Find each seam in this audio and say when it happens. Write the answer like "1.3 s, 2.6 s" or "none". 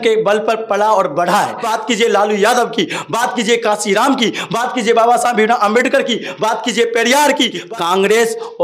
1.7 s, 7.6 s